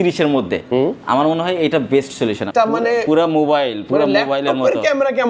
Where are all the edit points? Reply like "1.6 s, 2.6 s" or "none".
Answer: 2.5 s